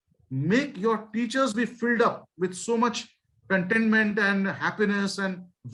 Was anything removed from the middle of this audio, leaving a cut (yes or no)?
no